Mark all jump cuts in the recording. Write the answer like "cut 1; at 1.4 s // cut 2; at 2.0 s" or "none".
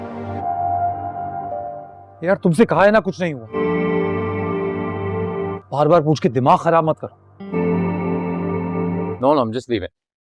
cut 1; at 7.5 s